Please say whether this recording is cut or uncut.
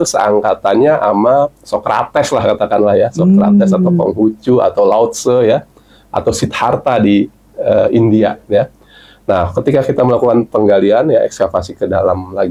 uncut